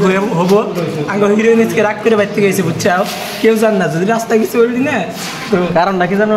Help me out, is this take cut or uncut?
uncut